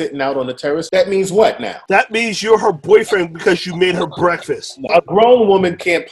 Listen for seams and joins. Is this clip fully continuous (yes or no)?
no